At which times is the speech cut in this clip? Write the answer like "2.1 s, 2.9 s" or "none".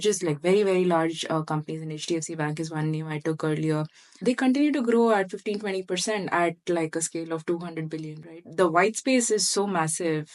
none